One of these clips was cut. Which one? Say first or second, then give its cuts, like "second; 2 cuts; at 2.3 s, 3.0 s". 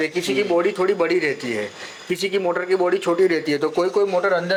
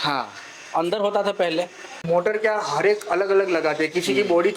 second; 1 cut; at 2.0 s